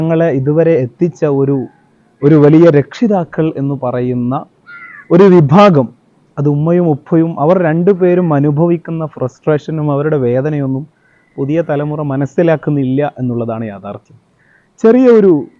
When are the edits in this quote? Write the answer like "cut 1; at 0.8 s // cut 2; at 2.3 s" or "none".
none